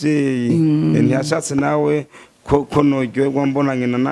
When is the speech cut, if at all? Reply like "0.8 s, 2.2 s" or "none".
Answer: none